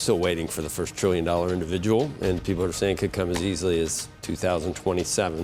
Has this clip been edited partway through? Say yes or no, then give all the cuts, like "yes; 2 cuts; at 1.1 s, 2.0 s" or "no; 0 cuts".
no; 0 cuts